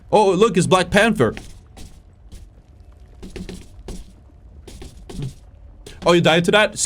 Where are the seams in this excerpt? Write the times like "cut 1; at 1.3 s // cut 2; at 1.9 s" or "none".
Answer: none